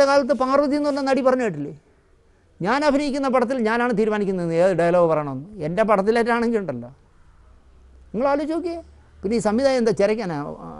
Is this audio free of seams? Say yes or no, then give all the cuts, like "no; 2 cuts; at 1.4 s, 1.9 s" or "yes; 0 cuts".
yes; 0 cuts